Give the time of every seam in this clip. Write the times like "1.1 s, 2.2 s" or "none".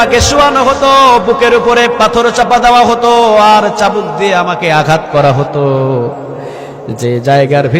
none